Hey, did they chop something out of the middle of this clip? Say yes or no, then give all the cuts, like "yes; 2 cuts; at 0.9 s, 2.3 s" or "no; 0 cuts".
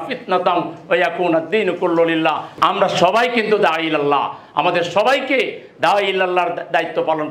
yes; 1 cut; at 2.5 s